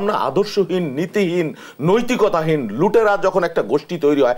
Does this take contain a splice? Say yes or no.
no